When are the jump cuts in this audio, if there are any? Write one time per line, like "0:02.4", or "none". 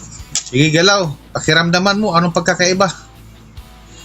0:03.1